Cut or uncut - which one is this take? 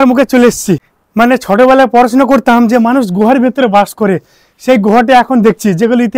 cut